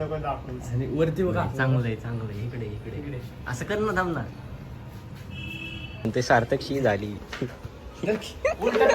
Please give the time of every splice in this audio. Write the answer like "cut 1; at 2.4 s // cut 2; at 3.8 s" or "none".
cut 1; at 6.1 s